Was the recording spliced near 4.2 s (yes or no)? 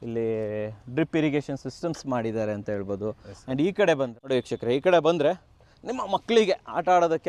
yes